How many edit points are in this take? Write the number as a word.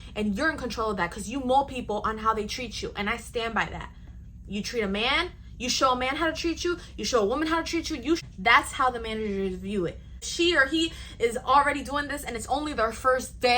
two